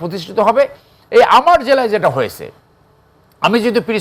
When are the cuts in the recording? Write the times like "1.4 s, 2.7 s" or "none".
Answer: 1.0 s